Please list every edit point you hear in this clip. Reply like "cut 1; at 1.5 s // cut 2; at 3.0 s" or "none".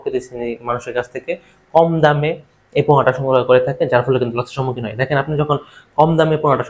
none